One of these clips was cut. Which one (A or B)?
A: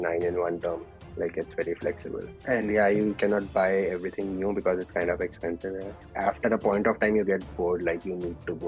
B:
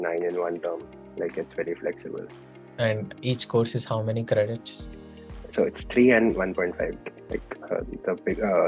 A